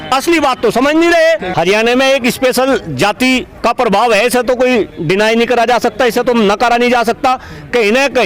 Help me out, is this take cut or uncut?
cut